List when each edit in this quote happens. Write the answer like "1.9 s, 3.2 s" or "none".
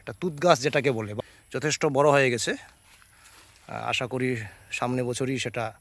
1.1 s

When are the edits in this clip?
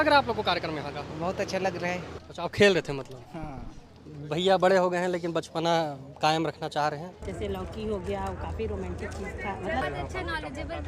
2.1 s, 7.1 s, 9.8 s

